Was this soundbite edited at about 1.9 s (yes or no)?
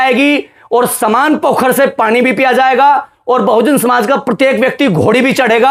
no